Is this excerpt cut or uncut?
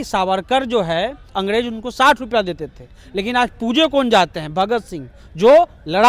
cut